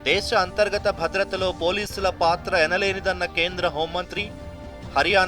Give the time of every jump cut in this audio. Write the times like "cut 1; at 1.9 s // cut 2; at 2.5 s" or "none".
cut 1; at 1.2 s